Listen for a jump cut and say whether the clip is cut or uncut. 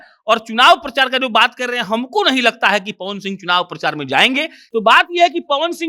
cut